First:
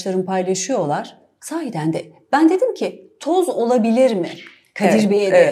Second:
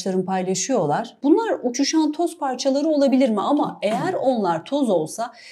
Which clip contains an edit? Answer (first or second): second